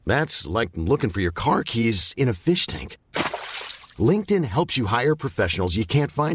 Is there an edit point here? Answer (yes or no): no